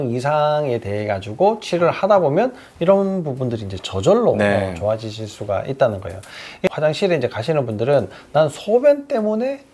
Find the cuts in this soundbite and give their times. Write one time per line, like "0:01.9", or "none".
0:06.7